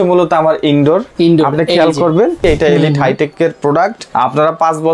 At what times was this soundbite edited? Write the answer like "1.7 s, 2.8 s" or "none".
1.1 s, 2.4 s, 4.0 s